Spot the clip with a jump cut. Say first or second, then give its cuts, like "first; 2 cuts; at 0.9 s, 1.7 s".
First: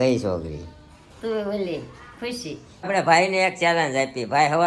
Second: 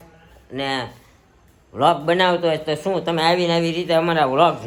first; 1 cut; at 2.9 s